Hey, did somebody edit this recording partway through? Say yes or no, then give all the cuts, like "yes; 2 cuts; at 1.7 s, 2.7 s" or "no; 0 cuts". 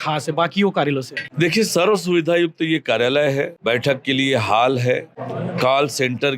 yes; 3 cuts; at 1.2 s, 3.5 s, 5.2 s